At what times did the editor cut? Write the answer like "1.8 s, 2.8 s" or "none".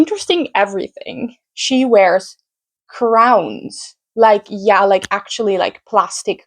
1.4 s